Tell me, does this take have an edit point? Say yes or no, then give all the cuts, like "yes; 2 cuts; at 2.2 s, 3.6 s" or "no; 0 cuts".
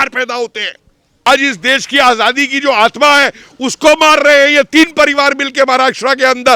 yes; 1 cut; at 1.3 s